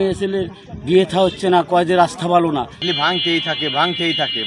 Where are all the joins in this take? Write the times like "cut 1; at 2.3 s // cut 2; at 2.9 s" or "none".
cut 1; at 2.8 s

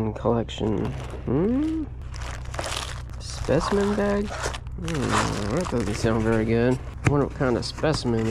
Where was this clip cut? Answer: none

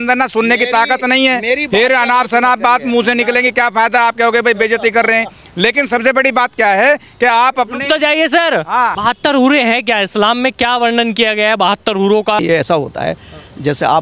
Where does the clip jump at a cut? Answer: cut 1; at 9.0 s // cut 2; at 12.4 s

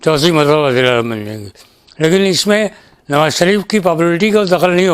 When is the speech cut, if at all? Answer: none

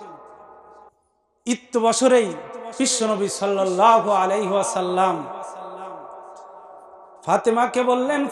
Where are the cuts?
cut 1; at 0.9 s

